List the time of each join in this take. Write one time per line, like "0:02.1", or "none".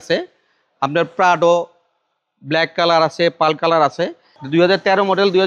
0:04.3